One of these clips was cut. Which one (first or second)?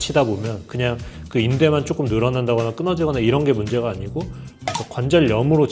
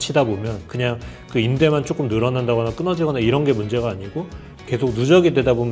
first